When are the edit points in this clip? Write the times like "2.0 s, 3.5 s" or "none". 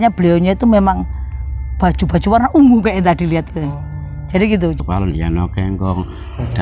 4.8 s